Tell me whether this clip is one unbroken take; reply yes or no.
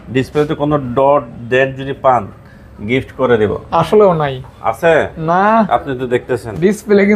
yes